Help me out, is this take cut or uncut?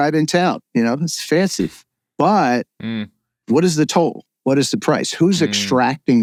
uncut